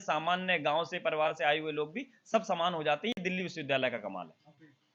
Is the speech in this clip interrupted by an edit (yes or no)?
no